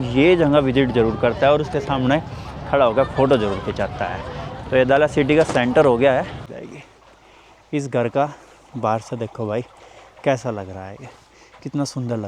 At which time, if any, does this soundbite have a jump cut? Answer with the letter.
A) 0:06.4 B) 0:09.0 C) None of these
A